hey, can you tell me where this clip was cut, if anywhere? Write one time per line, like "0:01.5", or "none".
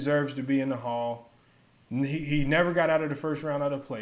none